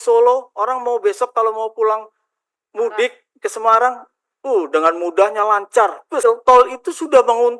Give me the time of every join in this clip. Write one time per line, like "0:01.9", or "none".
0:06.2

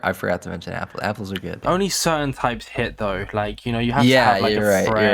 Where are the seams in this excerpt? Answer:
none

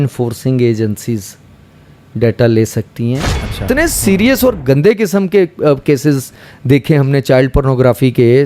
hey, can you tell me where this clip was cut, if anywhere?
0:03.6

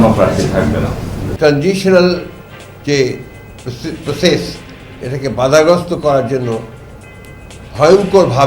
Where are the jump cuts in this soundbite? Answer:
0:01.2

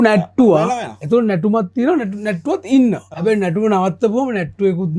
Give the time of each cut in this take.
0:03.1

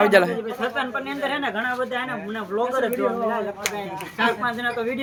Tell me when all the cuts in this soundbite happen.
none

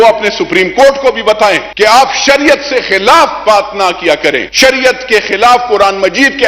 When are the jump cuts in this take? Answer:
0:01.7
0:04.5

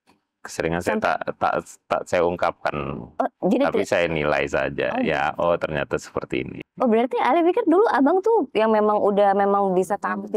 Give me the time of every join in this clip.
0:06.6

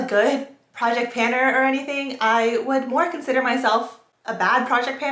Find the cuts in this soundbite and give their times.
none

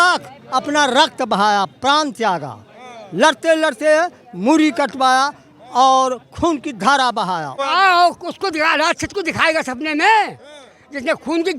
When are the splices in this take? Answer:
0:07.6

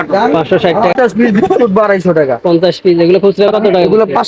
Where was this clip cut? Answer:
0:00.9

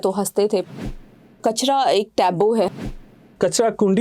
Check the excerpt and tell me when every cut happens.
0:01.4
0:03.2

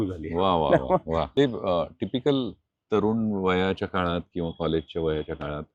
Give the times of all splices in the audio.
0:01.3

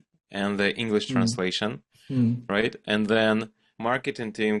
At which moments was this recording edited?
none

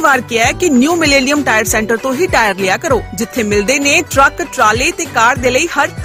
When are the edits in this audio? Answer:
none

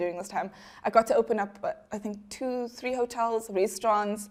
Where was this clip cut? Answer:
none

